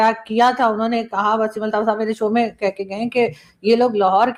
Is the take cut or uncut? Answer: uncut